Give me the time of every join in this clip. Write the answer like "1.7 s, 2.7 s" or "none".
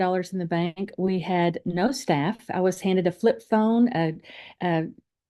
none